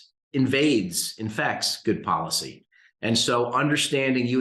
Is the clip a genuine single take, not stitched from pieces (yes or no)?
yes